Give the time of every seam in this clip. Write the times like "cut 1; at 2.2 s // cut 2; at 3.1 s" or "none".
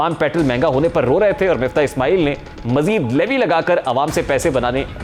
none